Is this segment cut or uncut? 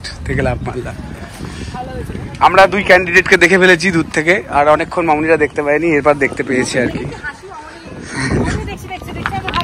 uncut